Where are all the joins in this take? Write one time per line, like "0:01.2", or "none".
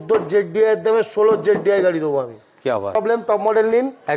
0:03.0